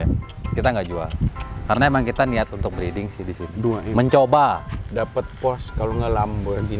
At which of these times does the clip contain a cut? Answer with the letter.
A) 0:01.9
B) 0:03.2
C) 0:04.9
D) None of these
D